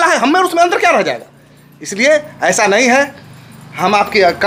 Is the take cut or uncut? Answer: uncut